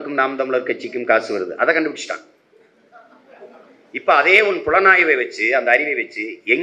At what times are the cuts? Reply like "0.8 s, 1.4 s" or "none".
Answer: none